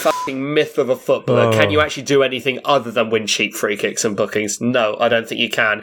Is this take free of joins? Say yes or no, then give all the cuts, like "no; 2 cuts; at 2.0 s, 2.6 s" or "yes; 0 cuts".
yes; 0 cuts